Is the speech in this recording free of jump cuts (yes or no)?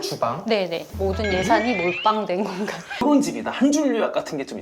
no